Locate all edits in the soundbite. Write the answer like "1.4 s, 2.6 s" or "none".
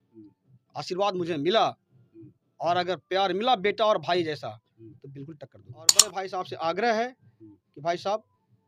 6.1 s